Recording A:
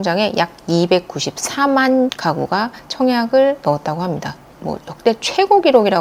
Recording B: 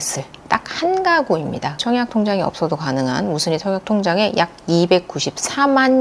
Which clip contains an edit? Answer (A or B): B